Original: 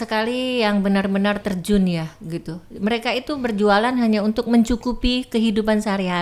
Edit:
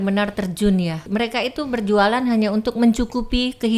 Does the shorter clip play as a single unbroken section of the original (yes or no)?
no